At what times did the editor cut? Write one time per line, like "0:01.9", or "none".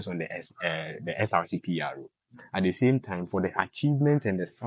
none